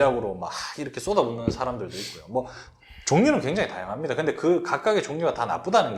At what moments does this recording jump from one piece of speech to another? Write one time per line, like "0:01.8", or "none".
none